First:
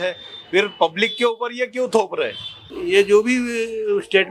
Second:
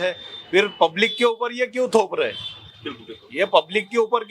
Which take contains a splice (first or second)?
first